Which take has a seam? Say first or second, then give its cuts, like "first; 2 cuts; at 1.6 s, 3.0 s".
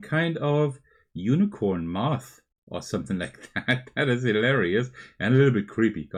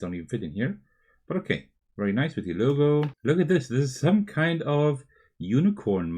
second; 1 cut; at 3.1 s